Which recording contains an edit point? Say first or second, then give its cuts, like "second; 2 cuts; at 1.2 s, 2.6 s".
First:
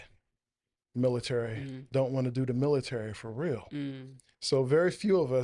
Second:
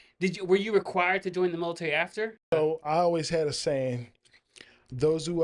second; 1 cut; at 2.5 s